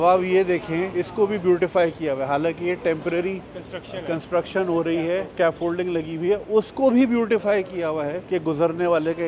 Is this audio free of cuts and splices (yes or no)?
no